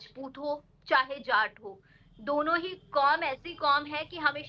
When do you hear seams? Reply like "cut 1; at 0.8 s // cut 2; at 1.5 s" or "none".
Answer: none